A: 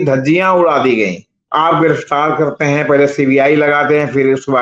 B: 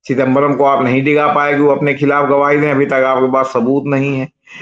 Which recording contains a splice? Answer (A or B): A